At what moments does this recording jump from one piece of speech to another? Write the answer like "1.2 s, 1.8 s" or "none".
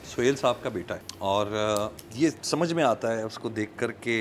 1.0 s, 2.0 s

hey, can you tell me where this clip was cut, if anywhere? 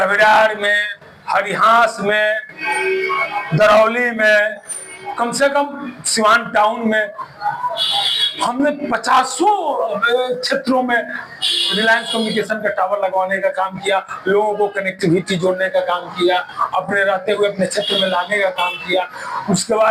none

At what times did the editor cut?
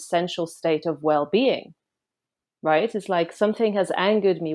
none

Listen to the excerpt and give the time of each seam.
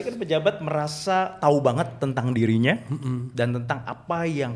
none

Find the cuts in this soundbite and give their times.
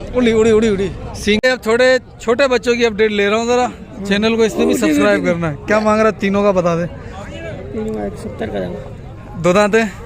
1.4 s

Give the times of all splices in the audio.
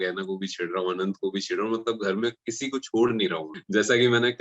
3.5 s

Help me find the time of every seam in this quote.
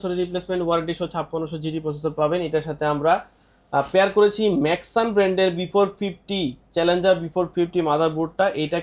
none

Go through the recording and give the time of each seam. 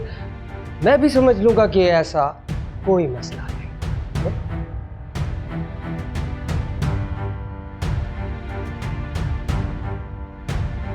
none

